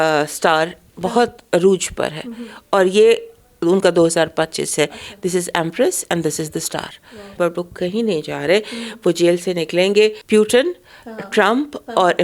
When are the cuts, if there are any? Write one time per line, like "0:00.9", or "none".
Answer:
0:07.3
0:10.2